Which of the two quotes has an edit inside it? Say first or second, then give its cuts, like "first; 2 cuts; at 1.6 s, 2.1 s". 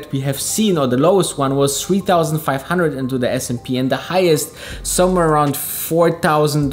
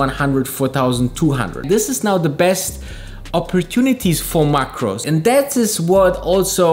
second; 2 cuts; at 1.6 s, 5.0 s